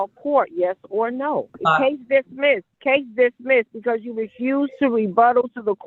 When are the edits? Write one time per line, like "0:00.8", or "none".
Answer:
0:01.5
0:02.7

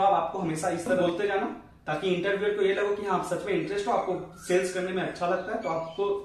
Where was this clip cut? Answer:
0:01.0

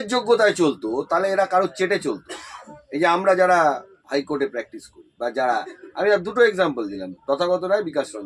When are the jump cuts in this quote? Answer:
none

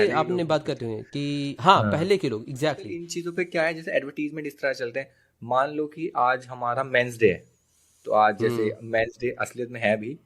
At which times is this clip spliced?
0:03.0

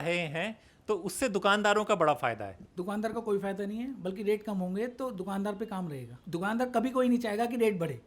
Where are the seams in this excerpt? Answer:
0:02.6
0:06.1

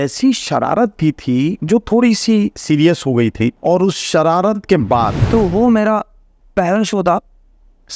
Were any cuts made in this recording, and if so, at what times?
0:01.6
0:03.6
0:05.2

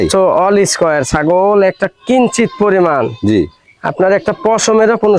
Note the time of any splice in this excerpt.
none

